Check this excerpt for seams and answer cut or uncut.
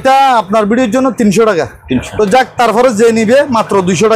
cut